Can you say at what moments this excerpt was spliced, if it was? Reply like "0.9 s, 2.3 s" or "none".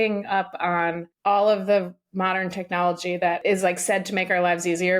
1.1 s, 3.4 s